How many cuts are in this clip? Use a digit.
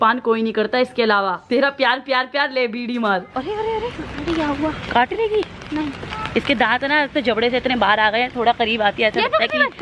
2